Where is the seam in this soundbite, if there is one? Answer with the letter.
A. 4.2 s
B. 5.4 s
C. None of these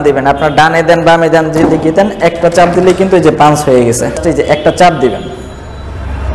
A